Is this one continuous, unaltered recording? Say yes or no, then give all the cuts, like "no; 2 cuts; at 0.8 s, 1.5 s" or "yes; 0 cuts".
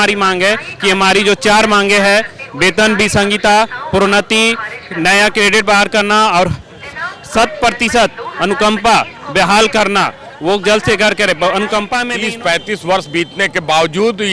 no; 1 cut; at 12.1 s